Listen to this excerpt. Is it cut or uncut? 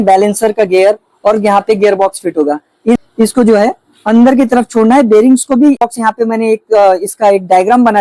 cut